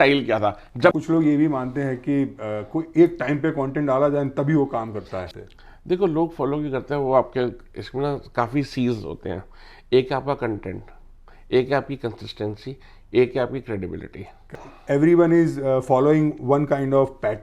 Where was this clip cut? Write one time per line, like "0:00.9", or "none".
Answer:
0:00.9
0:05.3
0:14.6